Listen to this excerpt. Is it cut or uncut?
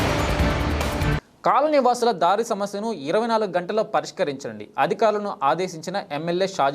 uncut